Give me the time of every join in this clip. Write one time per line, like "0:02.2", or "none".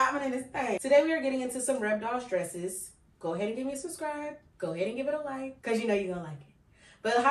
0:00.8
0:04.4
0:05.5